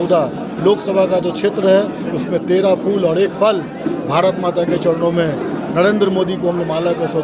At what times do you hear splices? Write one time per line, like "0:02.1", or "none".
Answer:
none